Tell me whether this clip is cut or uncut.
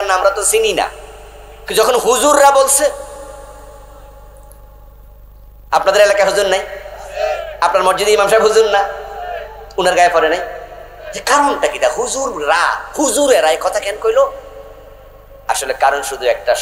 uncut